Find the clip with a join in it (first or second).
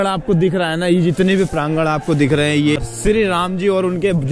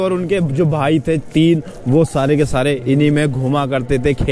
first